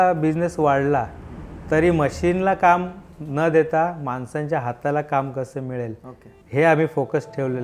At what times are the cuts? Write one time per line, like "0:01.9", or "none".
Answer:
none